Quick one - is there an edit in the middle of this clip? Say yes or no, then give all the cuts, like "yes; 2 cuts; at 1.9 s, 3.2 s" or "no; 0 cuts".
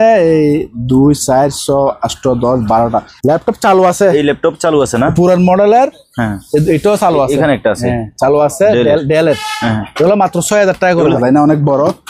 yes; 2 cuts; at 3.1 s, 11.2 s